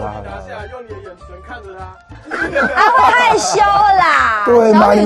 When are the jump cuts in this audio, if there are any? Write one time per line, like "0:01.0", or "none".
none

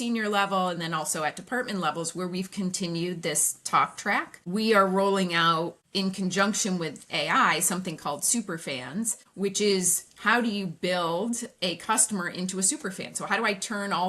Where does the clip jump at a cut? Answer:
0:04.4
0:05.8
0:09.2

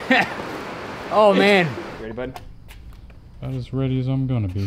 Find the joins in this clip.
0:02.0

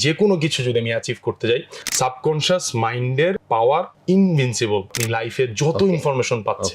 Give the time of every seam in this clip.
0:01.8
0:03.5
0:04.9

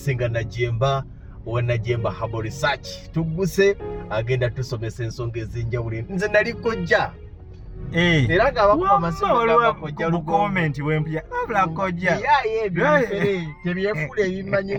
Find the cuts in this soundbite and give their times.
none

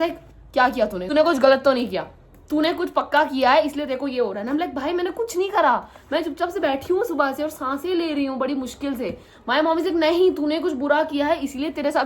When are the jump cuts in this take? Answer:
0:01.0

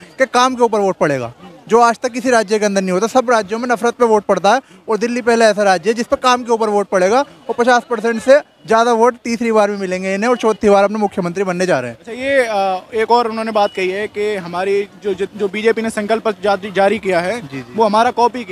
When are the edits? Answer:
none

